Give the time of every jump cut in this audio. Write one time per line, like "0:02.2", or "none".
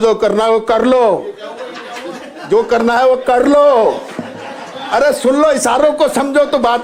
none